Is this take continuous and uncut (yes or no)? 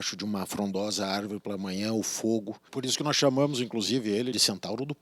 no